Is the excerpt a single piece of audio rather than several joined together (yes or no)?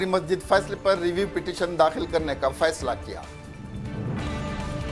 yes